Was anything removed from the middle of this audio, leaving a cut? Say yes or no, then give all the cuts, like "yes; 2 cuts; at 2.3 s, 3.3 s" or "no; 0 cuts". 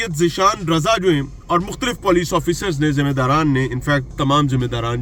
no; 0 cuts